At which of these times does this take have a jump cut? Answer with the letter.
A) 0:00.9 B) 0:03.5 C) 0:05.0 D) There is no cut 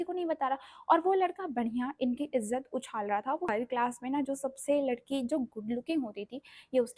B